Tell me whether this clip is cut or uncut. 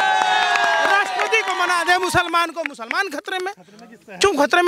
uncut